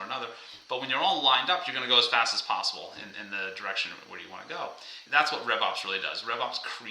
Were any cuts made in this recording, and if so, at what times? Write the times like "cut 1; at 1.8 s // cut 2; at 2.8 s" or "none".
cut 1; at 5.0 s